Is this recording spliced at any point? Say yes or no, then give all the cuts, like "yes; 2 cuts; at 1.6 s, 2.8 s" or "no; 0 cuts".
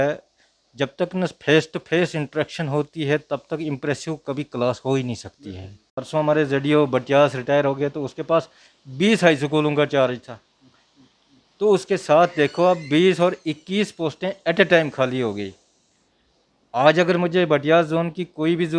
yes; 1 cut; at 5.9 s